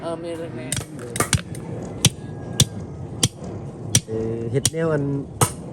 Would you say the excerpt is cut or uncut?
cut